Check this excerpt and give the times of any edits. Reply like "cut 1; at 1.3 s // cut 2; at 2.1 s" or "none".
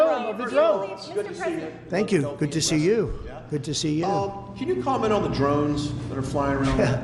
none